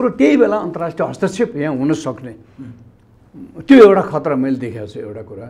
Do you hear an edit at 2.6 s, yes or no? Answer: no